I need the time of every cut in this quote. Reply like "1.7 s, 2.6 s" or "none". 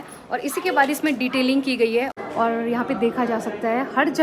2.2 s

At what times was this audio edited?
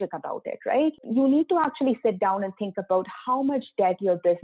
1.0 s

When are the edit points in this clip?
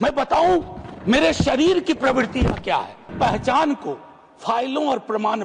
3.1 s

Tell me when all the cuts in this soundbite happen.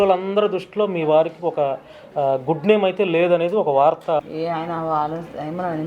4.2 s

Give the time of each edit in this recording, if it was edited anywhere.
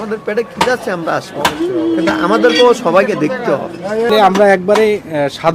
4.1 s

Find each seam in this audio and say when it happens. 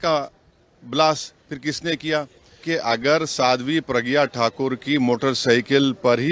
2.6 s

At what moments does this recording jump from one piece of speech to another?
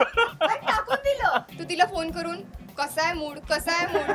1.5 s

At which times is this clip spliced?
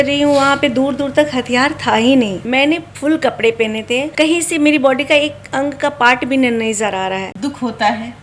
2.4 s, 4.1 s, 7.3 s

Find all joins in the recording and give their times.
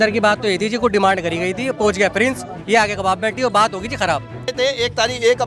4.5 s

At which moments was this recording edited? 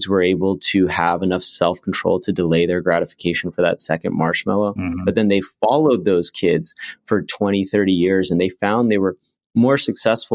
none

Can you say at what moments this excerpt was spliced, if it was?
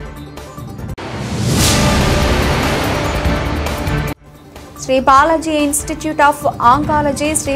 0.9 s

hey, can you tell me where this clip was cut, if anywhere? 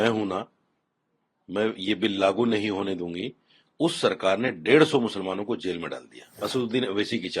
6.4 s

